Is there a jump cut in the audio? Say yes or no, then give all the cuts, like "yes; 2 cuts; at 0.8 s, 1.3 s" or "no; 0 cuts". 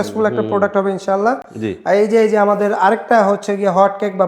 no; 0 cuts